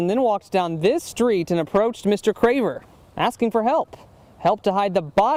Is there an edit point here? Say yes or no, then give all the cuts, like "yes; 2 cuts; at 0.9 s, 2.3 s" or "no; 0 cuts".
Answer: no; 0 cuts